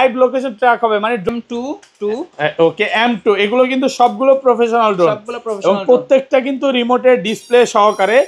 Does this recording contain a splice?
yes; 1 cut; at 1.3 s

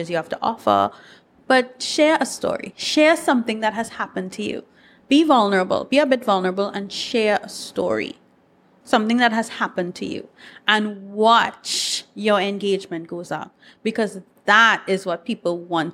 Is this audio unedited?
no; 1 cut; at 4.9 s

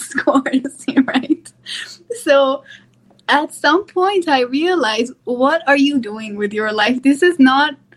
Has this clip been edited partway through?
no; 0 cuts

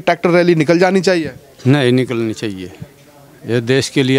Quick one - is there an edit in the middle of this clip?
no; 0 cuts

